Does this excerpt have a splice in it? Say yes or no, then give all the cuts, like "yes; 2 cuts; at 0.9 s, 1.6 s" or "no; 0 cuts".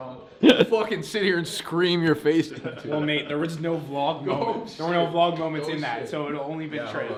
no; 0 cuts